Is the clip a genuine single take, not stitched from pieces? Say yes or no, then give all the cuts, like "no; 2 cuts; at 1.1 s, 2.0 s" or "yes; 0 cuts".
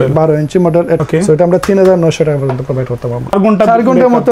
no; 2 cuts; at 1.0 s, 3.3 s